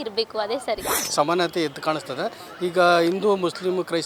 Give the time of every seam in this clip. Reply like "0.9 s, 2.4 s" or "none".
0.9 s